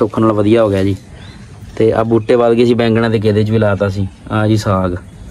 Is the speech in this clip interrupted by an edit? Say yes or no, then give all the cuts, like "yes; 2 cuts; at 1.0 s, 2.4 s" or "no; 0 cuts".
no; 0 cuts